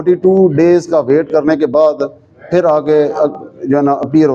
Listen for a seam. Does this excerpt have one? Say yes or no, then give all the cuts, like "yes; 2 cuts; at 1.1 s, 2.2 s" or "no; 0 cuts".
no; 0 cuts